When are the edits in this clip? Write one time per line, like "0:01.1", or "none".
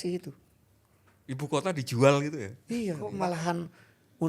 0:03.0